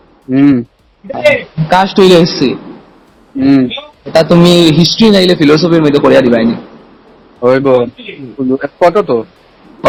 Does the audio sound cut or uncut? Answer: uncut